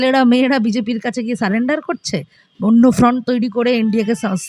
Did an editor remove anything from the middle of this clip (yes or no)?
no